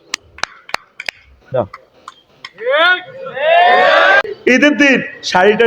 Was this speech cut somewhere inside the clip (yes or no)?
yes